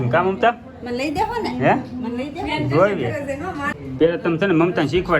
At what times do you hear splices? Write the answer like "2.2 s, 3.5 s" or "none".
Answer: 3.7 s